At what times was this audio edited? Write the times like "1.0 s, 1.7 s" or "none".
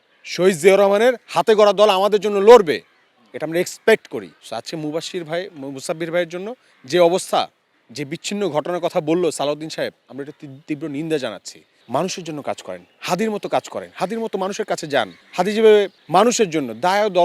4.4 s, 11.8 s, 15.2 s, 16.0 s